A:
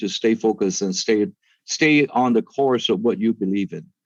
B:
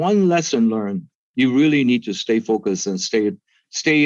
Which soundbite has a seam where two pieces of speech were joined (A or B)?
B